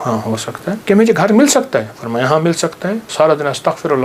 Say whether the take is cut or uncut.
cut